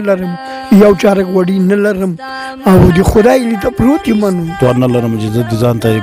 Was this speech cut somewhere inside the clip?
yes; 1 cut; at 4.6 s

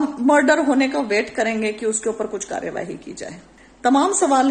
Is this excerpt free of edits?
yes; 0 cuts

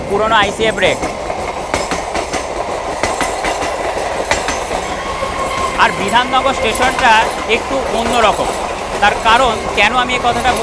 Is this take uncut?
yes; 0 cuts

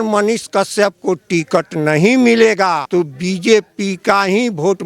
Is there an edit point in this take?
yes; 1 cut; at 2.8 s

